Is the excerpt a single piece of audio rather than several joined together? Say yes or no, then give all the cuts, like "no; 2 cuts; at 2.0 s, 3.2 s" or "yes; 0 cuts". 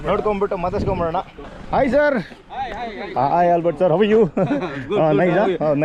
yes; 0 cuts